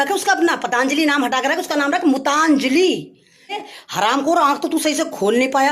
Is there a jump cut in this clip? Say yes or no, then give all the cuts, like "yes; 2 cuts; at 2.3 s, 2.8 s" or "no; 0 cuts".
yes; 1 cut; at 3.6 s